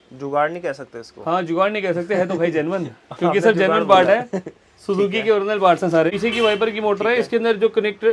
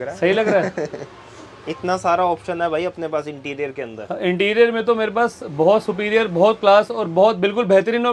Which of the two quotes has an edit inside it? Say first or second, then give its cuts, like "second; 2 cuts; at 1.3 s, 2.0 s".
first; 1 cut; at 6.1 s